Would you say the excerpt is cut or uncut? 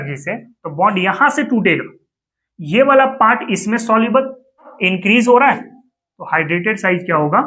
cut